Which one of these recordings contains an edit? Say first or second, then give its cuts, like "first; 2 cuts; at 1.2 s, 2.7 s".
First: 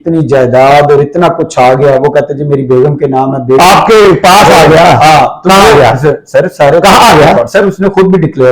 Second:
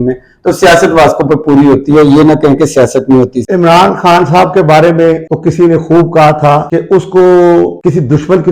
second; 4 cuts; at 3.4 s, 5.3 s, 6.7 s, 7.8 s